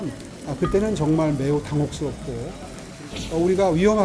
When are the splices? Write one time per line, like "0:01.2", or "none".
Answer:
0:02.9